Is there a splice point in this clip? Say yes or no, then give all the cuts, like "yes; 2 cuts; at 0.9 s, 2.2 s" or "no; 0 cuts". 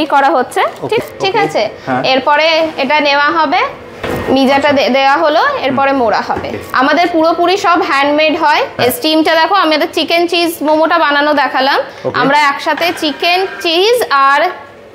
yes; 4 cuts; at 1.0 s, 4.0 s, 6.6 s, 8.7 s